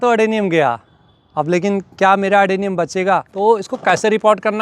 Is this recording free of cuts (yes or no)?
no